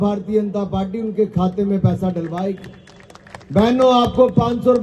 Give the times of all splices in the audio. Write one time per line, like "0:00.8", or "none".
none

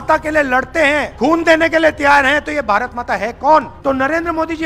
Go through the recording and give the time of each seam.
0:01.1
0:03.7

